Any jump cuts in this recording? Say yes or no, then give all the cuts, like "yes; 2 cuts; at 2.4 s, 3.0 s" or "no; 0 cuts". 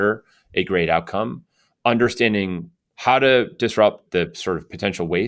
yes; 1 cut; at 4.0 s